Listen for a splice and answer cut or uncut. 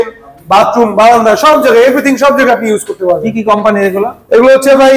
uncut